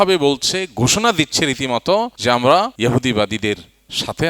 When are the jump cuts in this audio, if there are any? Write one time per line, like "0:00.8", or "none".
0:02.1
0:02.7